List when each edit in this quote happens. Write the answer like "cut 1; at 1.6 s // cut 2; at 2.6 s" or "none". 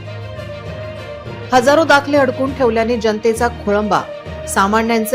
cut 1; at 1.5 s